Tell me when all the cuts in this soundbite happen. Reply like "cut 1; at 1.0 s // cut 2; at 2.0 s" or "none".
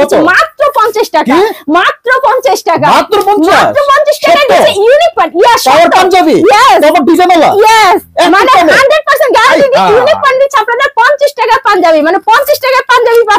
none